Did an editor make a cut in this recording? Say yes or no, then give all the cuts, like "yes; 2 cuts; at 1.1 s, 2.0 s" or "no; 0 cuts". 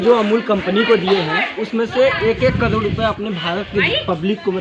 no; 0 cuts